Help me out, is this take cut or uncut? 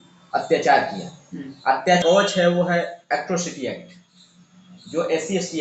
cut